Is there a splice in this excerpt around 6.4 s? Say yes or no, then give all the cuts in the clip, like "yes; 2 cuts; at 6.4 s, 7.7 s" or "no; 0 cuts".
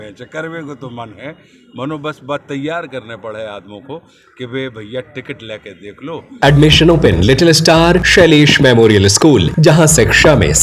yes; 3 cuts; at 6.4 s, 8.0 s, 9.5 s